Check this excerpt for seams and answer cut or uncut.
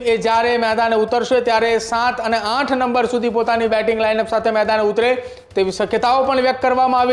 uncut